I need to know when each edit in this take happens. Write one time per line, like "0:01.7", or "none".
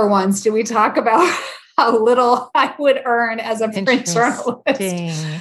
none

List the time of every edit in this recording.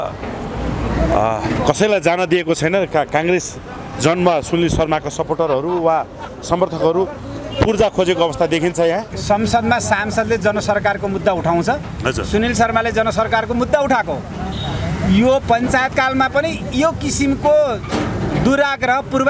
0:09.1

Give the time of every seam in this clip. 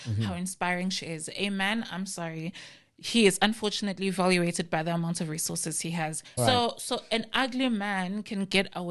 0:06.2

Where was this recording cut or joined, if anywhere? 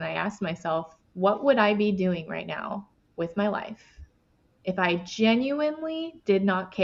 0:01.0

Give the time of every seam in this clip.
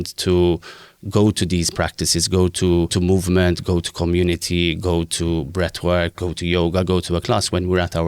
0:02.9

